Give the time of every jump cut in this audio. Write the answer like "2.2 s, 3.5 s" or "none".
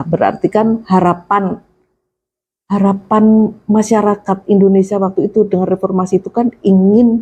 none